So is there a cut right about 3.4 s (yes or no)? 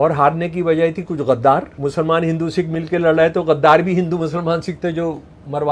no